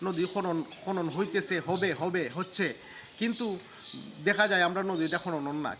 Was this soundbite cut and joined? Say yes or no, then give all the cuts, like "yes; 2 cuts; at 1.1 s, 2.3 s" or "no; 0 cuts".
no; 0 cuts